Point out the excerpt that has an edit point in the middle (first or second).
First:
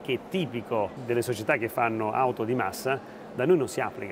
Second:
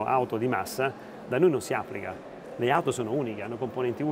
first